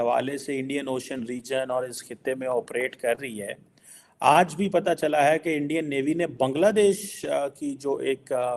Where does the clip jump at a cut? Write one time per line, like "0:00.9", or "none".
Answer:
none

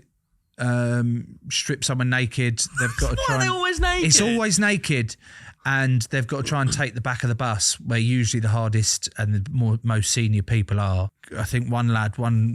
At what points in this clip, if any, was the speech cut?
0:11.2

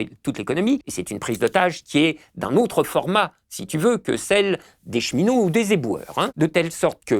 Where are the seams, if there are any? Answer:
0:00.9
0:06.3

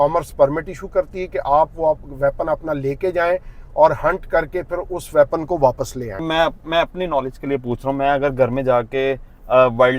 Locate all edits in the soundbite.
0:06.3

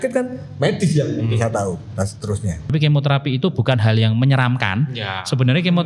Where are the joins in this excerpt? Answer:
0:02.7

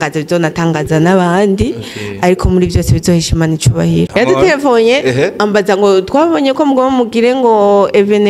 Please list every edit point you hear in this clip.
0:04.1

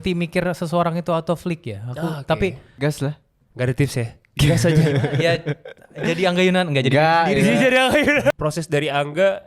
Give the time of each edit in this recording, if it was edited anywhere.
0:03.0
0:08.3

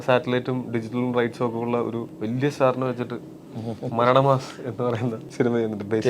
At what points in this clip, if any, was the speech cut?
0:02.1
0:05.2

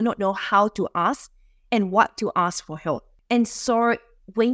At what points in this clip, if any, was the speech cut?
0:03.1

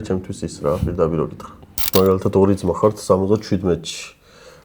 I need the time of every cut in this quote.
0:01.9

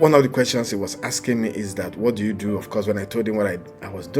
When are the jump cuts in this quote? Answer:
none

